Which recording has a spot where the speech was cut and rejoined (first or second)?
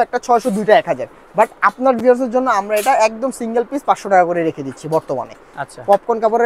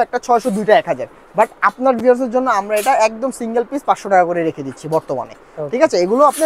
first